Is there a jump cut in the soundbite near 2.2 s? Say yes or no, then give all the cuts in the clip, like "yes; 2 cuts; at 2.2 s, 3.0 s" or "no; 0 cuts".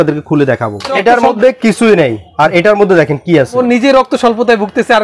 no; 2 cuts; at 1.0 s, 3.6 s